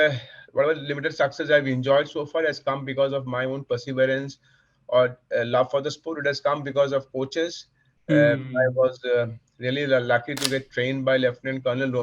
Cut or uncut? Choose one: uncut